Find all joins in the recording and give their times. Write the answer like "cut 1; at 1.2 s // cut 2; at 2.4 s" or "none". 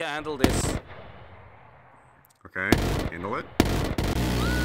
none